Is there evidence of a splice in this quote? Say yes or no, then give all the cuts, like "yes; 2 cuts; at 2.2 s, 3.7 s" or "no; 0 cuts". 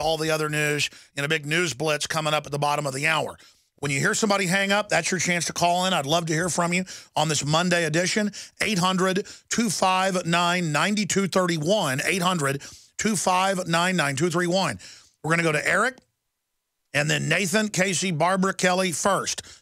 yes; 1 cut; at 11.7 s